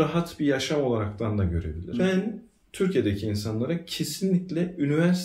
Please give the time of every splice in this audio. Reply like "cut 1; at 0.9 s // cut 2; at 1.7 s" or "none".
cut 1; at 1.8 s